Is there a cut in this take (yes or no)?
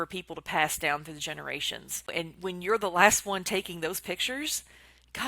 yes